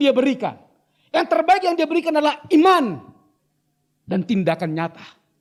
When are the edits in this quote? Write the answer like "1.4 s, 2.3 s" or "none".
none